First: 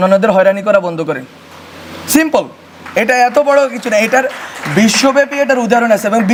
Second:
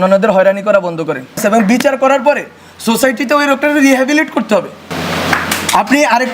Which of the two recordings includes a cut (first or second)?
second